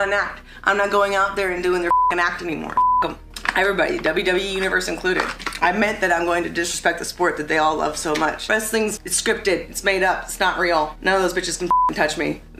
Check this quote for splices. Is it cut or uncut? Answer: cut